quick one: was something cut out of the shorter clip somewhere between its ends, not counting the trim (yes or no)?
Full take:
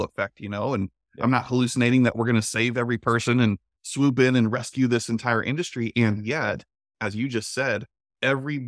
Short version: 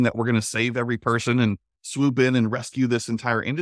no